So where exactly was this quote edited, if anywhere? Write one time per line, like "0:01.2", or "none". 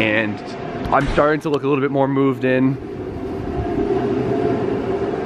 none